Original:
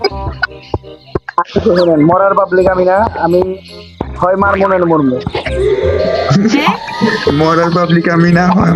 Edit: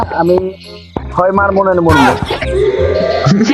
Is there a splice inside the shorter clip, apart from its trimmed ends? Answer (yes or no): no